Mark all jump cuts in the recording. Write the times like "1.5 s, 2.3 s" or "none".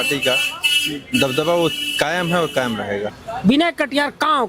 3.2 s